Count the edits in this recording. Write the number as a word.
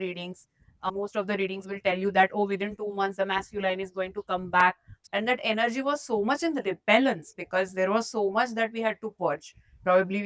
one